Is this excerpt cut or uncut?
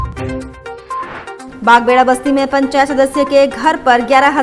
cut